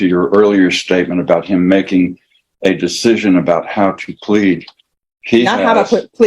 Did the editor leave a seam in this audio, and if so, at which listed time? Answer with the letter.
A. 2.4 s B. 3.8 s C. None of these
C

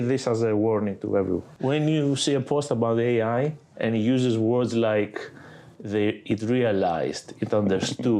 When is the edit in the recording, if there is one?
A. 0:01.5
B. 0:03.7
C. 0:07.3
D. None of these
A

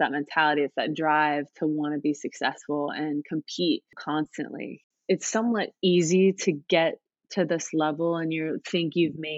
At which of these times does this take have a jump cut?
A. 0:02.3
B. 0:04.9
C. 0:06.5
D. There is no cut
B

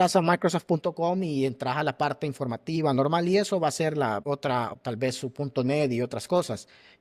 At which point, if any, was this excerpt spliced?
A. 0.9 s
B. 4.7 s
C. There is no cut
B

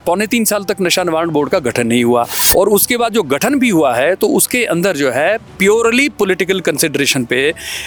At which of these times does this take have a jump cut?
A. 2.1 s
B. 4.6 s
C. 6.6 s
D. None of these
D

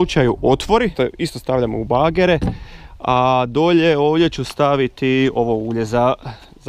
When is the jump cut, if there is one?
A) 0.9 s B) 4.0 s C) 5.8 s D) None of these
A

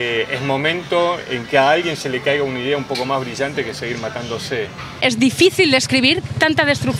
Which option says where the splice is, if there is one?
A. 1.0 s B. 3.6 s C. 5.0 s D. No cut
C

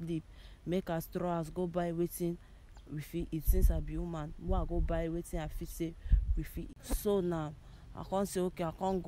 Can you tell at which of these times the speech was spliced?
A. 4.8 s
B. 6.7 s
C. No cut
B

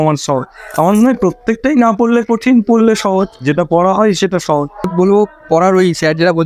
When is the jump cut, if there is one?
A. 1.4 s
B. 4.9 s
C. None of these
B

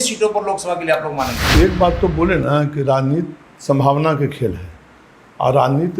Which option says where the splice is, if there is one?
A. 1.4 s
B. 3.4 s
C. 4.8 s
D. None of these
A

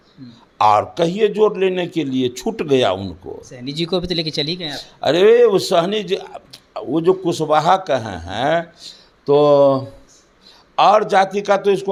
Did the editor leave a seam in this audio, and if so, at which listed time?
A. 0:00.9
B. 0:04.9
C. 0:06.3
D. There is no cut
D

